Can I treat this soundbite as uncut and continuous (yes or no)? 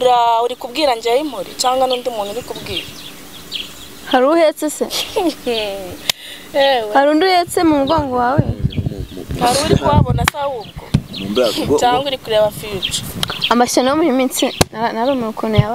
yes